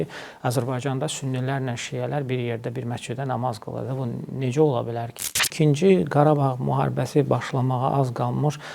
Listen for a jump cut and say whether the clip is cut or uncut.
cut